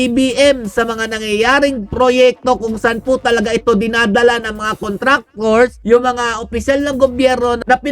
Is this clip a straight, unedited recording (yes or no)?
yes